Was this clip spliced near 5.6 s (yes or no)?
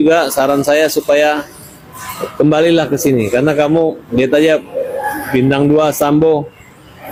no